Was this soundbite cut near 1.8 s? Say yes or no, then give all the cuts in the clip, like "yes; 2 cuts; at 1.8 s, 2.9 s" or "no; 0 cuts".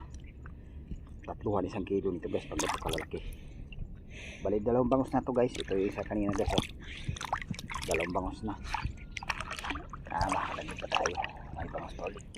no; 0 cuts